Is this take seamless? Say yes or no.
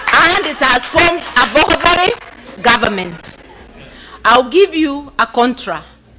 yes